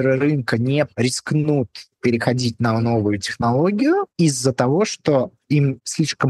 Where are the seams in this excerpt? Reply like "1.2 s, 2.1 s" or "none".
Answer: 0.9 s, 4.1 s